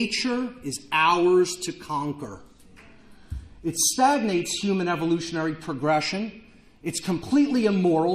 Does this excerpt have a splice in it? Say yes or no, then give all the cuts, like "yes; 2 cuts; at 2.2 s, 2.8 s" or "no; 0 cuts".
yes; 1 cut; at 3.5 s